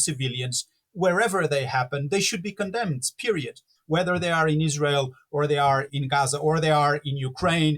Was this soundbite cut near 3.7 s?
yes; 2 cuts; at 3.7 s, 5.9 s

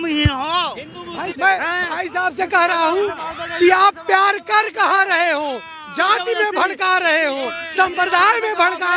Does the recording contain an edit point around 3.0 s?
no; 1 cut; at 1.3 s

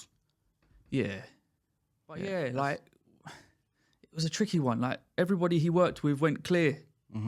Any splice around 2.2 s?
yes; 1 cut; at 2.2 s

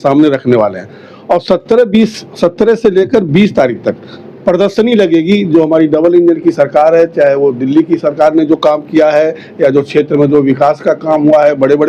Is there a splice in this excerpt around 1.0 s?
no; 0 cuts

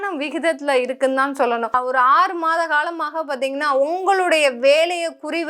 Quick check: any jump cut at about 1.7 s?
yes; 1 cut; at 1.7 s

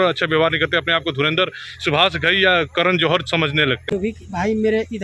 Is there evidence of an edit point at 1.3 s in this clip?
no; 1 cut; at 3.9 s

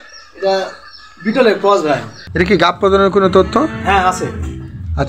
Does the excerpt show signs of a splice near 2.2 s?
yes; 1 cut; at 2.2 s

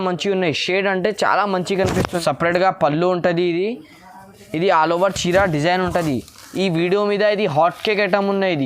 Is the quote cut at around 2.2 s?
yes; 1 cut; at 2.2 s

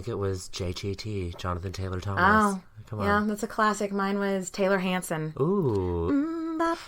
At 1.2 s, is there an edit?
no; 1 cut; at 5.3 s

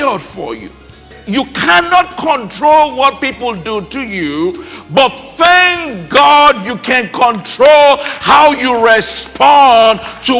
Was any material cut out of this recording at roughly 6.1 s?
no; 1 cut; at 1.1 s

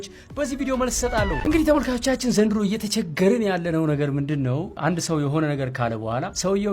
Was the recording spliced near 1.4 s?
yes; 1 cut; at 1.4 s

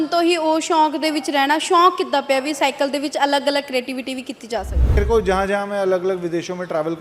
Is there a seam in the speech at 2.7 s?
no; 1 cut; at 5.0 s

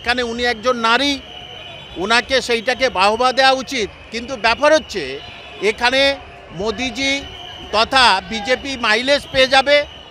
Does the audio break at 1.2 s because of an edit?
no; 0 cuts

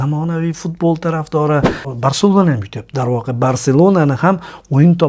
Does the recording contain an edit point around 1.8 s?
yes; 1 cut; at 1.8 s

